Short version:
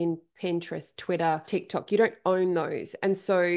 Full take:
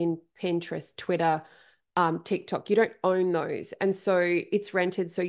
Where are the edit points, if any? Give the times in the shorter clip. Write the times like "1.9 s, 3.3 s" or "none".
1.4 s